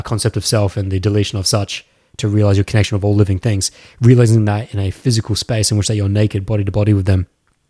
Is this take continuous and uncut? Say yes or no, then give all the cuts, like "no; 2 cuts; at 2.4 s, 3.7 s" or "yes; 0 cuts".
yes; 0 cuts